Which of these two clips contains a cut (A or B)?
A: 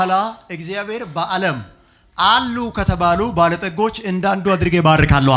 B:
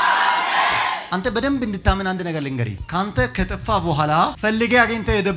B